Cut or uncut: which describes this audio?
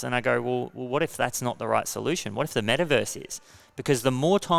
uncut